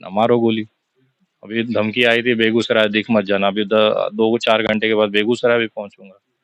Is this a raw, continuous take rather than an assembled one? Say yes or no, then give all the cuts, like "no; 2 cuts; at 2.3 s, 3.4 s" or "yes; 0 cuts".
yes; 0 cuts